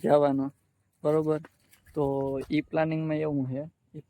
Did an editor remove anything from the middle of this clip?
no; 0 cuts

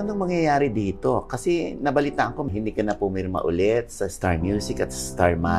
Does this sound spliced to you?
yes; 1 cut; at 2.4 s

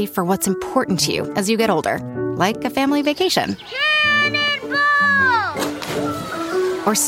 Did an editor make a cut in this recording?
no; 0 cuts

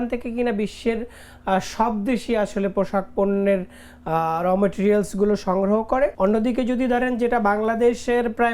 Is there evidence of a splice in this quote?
yes; 1 cut; at 6.1 s

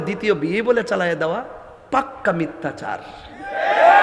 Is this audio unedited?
yes; 0 cuts

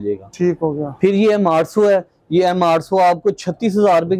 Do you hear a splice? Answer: no; 0 cuts

